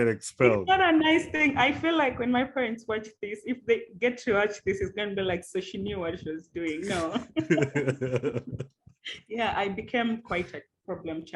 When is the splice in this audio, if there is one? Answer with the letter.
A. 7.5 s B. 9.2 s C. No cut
C